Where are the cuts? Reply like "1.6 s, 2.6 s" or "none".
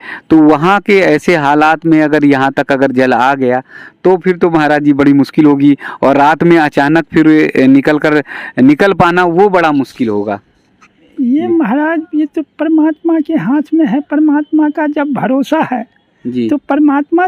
none